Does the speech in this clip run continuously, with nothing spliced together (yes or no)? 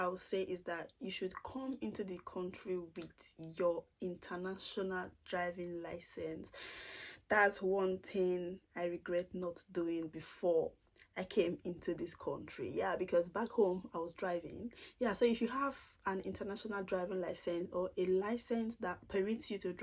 yes